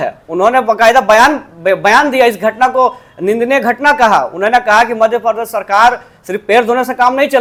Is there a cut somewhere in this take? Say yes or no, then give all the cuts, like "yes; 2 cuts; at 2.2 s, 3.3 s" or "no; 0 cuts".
no; 0 cuts